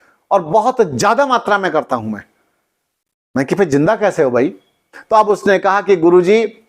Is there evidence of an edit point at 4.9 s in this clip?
yes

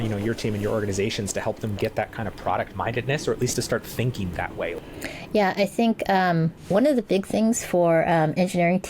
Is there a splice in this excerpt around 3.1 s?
no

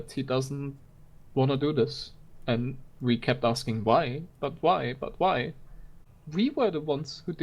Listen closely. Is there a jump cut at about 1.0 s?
no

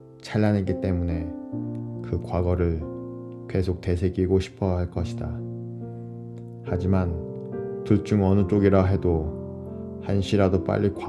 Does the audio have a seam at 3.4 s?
no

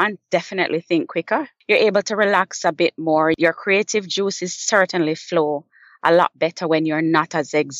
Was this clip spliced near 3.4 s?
yes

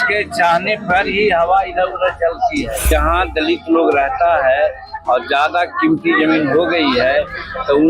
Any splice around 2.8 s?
yes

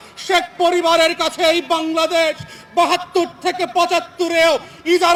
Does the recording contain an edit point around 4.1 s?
no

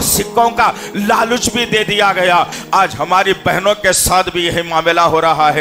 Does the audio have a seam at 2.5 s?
yes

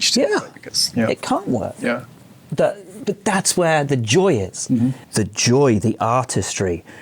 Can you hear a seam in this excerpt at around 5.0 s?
yes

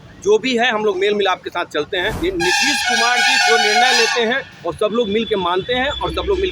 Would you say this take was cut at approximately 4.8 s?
no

